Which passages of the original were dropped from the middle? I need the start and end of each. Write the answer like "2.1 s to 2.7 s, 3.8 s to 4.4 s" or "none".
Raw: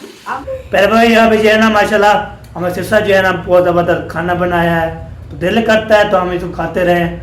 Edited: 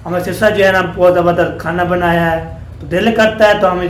none